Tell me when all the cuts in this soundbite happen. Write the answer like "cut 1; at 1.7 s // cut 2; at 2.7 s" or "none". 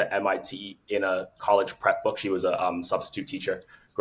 none